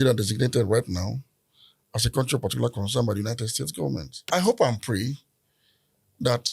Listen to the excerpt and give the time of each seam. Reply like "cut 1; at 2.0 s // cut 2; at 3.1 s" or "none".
cut 1; at 4.2 s